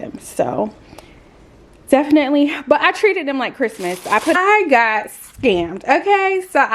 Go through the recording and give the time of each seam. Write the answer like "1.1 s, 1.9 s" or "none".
4.4 s